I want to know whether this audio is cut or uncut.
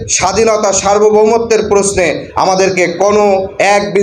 uncut